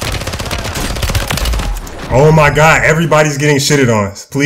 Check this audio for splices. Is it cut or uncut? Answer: uncut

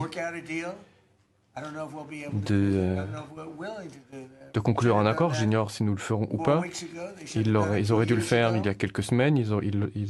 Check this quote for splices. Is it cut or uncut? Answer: uncut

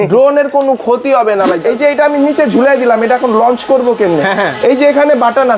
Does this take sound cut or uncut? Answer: cut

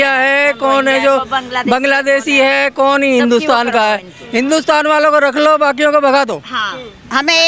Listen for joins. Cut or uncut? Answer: uncut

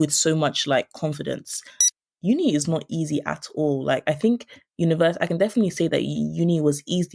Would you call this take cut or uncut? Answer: cut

